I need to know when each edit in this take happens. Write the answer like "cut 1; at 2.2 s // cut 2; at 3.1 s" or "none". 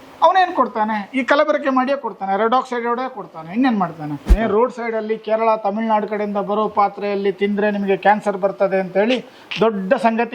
cut 1; at 4.3 s